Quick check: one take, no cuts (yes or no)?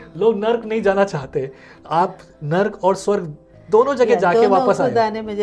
yes